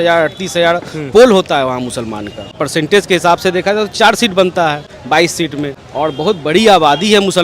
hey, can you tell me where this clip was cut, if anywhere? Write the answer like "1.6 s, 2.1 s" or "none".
2.6 s, 4.9 s, 5.8 s